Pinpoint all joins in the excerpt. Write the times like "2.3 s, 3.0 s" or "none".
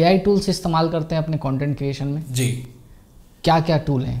none